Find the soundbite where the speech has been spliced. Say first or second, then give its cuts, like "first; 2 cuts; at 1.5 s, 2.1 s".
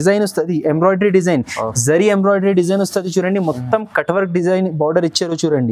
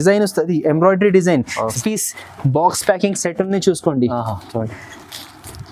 second; 1 cut; at 1.7 s